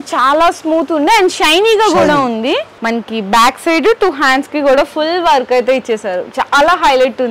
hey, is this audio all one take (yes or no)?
no